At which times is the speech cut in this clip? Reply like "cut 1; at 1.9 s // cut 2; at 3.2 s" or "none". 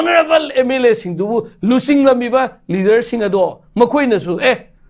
none

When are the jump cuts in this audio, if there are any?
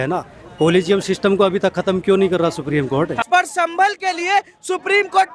cut 1; at 3.1 s

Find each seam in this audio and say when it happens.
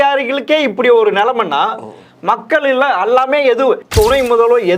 cut 1; at 3.9 s

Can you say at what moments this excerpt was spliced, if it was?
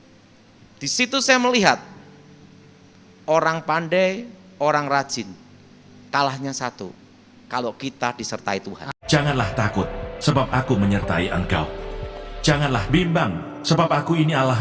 cut 1; at 8.8 s

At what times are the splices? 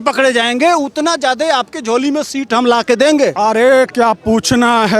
cut 1; at 3.3 s

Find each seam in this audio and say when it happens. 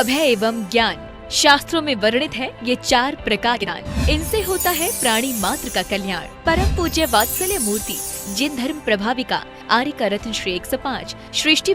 cut 1; at 3.6 s

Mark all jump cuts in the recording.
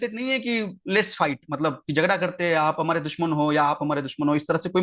none

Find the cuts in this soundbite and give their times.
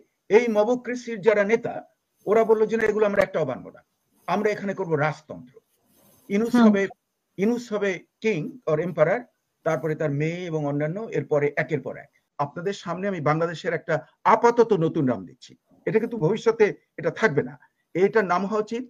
cut 1; at 12.2 s

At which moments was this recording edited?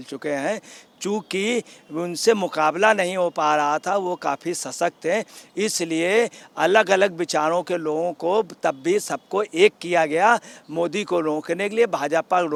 none

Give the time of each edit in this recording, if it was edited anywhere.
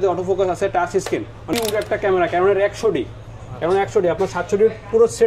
cut 1; at 1.4 s

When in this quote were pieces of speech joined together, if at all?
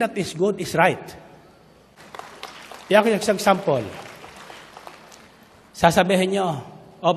cut 1; at 2.0 s

